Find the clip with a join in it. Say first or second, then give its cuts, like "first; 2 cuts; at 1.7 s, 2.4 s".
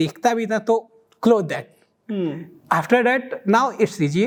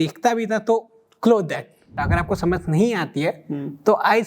second; 1 cut; at 1.9 s